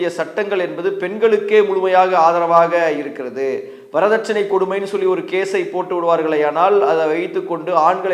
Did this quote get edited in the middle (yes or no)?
no